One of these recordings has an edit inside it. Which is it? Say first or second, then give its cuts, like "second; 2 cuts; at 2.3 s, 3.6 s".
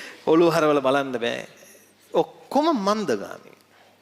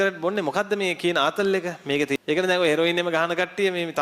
second; 1 cut; at 2.2 s